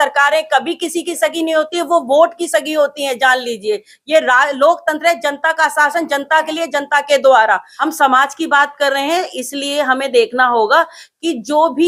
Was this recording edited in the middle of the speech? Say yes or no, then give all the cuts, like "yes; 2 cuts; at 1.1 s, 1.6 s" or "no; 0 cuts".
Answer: yes; 1 cut; at 7.8 s